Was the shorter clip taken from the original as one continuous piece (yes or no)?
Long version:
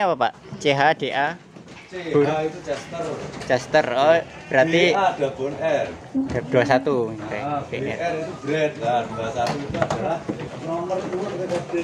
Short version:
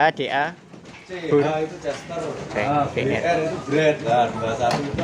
no